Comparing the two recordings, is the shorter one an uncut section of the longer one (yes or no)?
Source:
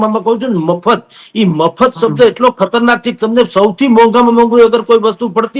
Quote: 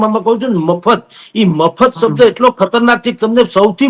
yes